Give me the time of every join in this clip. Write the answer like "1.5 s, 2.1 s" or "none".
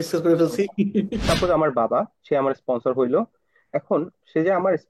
1.2 s